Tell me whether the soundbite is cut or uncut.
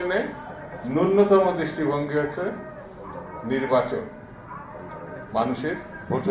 uncut